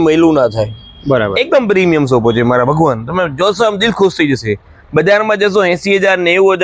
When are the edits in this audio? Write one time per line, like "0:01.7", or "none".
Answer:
none

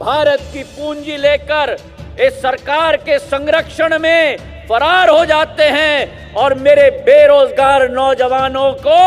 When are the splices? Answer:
none

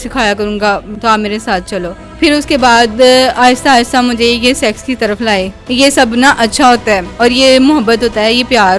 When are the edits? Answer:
0:00.9
0:02.0
0:05.6
0:07.1

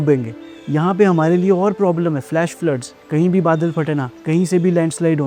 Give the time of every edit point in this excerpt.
0:02.9
0:04.1

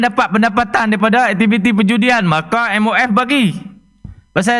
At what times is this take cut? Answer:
none

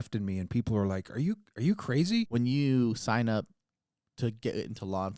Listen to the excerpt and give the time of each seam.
0:02.3

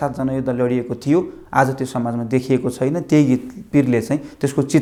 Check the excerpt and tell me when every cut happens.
none

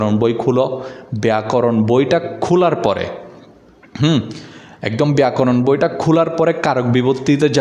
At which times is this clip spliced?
none

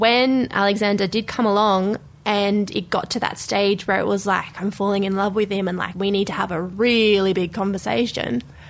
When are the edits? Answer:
none

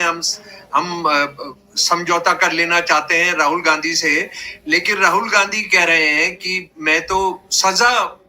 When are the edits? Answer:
none

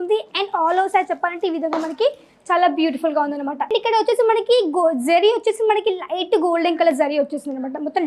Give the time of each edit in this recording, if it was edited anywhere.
0:03.7

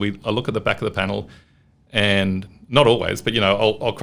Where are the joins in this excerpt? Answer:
none

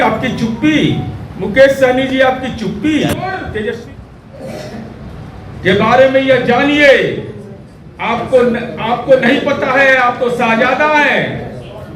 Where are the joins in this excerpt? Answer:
0:03.4

